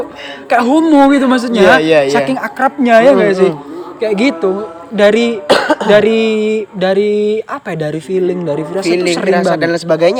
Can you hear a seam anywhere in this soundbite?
no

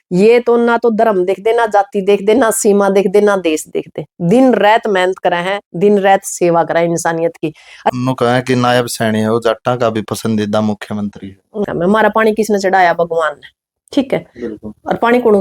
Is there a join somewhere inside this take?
yes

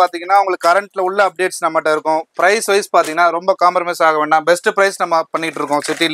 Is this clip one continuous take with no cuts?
yes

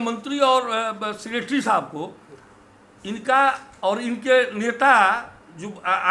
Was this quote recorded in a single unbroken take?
yes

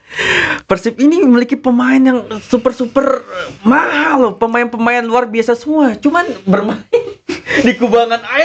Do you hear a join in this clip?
no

